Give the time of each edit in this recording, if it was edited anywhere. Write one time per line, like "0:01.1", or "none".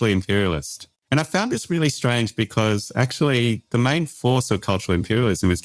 0:00.9